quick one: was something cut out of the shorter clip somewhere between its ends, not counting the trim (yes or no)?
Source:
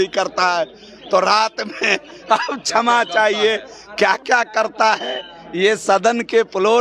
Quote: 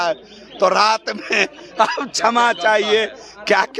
no